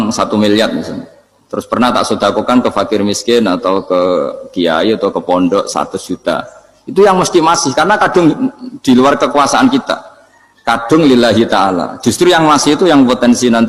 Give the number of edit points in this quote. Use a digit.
0